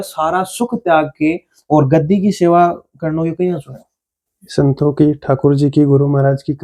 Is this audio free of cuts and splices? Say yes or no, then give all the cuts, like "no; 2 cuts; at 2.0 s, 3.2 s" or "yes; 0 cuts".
yes; 0 cuts